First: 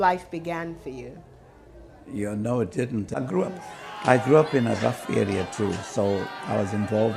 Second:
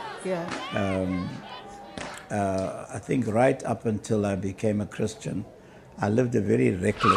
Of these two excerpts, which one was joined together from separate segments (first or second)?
first